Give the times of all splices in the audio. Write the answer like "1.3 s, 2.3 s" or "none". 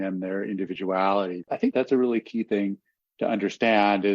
1.5 s